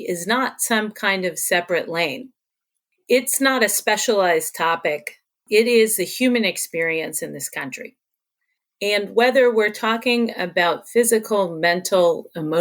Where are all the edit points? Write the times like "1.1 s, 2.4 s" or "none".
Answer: 3.0 s